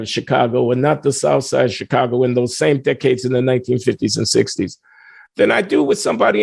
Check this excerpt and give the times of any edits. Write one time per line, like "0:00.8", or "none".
none